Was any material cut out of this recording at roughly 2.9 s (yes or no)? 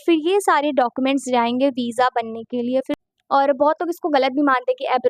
yes